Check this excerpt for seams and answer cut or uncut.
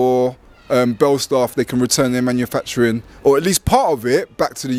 uncut